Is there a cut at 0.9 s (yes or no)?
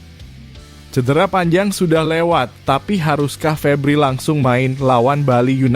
yes